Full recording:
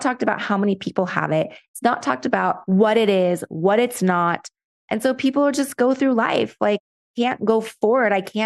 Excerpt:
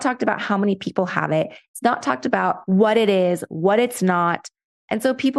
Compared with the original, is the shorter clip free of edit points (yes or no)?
yes